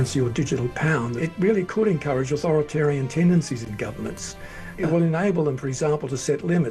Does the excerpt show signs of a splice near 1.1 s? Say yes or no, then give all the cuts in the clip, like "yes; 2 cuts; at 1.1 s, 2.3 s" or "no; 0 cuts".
yes; 3 cuts; at 1.1 s, 2.4 s, 4.7 s